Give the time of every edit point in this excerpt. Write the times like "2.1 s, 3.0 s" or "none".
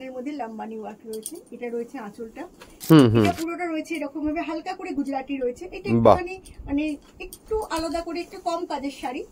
2.7 s